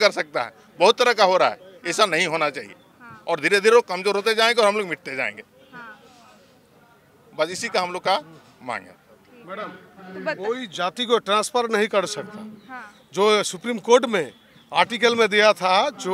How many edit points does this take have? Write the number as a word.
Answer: zero